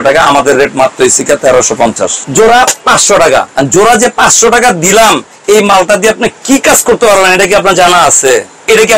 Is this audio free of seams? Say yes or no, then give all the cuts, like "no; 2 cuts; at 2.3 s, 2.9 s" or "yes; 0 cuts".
no; 2 cuts; at 2.1 s, 3.5 s